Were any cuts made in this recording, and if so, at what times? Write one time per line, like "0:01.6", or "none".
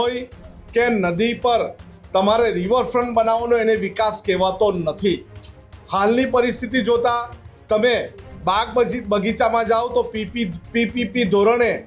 none